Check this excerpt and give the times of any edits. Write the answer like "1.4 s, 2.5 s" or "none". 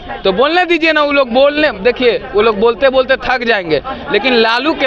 none